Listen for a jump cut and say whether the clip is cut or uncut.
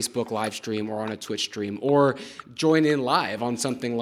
uncut